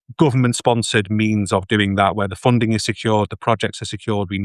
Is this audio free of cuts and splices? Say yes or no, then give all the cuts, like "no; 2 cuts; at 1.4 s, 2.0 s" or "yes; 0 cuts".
yes; 0 cuts